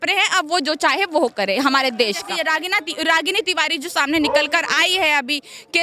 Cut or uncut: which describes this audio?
cut